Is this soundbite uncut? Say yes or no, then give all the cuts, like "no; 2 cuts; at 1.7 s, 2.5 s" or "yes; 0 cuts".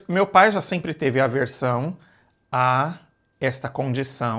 yes; 0 cuts